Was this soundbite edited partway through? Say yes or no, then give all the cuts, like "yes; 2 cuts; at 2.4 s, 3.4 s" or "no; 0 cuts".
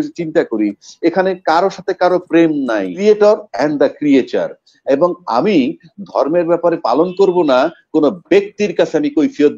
yes; 1 cut; at 2.9 s